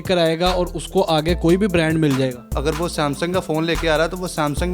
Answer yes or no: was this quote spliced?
yes